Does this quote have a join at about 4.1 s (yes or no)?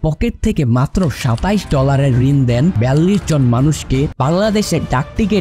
yes